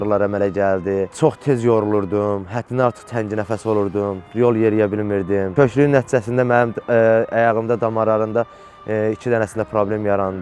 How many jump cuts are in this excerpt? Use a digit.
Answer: 1